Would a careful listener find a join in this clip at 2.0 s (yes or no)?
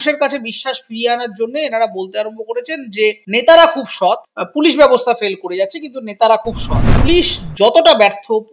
no